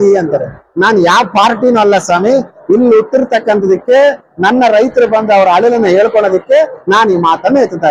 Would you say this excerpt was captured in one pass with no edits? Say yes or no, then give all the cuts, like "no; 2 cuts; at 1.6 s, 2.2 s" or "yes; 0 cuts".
yes; 0 cuts